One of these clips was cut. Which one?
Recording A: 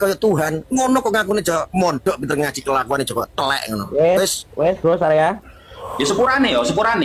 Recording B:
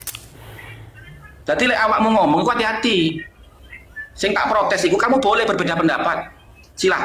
A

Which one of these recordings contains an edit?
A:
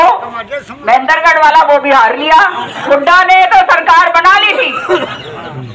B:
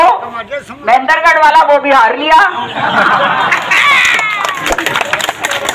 A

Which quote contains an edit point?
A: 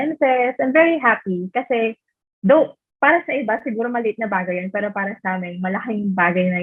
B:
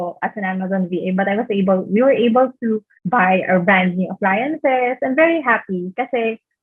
B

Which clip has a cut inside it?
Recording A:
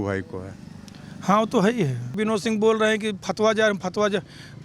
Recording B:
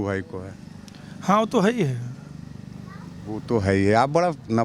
A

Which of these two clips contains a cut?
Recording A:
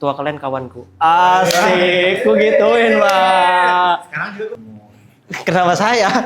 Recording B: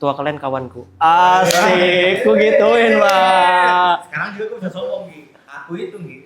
A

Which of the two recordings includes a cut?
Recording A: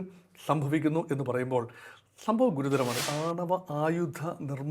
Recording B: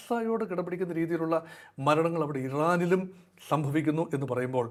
A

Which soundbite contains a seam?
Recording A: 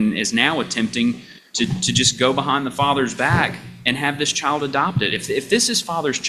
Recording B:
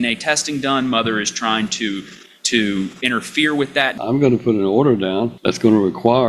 B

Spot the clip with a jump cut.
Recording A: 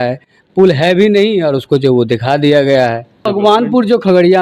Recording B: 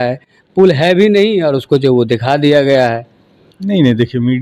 A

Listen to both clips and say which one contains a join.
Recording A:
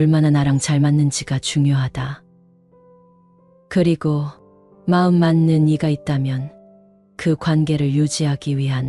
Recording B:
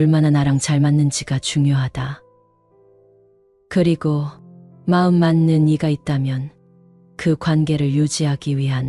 B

